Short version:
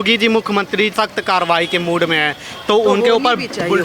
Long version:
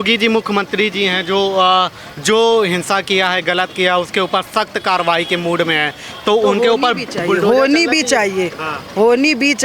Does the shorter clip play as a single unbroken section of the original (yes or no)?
no